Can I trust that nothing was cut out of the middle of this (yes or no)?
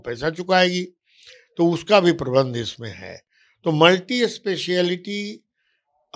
yes